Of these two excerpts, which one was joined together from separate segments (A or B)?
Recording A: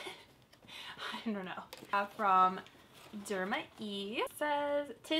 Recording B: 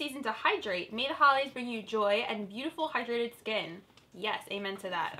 A